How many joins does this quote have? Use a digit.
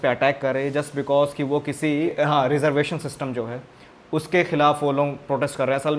0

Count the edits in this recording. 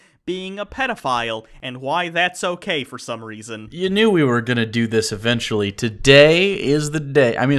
1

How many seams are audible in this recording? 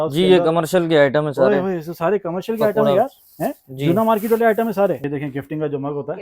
1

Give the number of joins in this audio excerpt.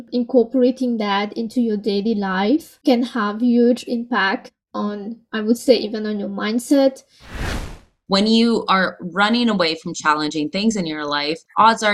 1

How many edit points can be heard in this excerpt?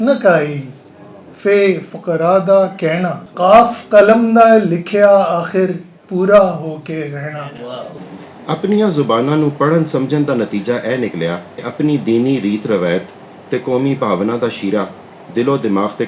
3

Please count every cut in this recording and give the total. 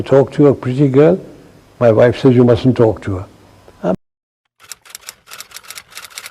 1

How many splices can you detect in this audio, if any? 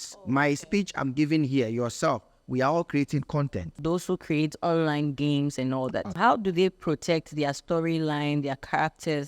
2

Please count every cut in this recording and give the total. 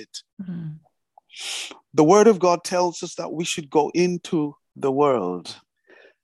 1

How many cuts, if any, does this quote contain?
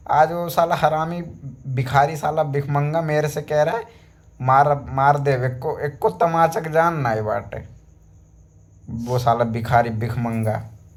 0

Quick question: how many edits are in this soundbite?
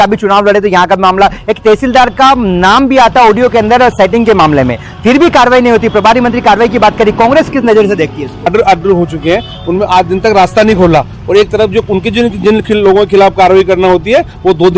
1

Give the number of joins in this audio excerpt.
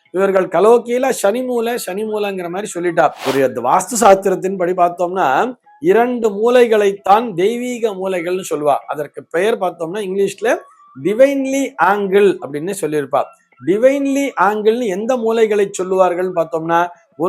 1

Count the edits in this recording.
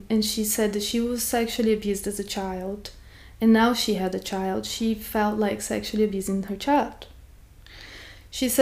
0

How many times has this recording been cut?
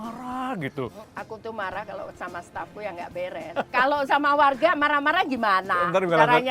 2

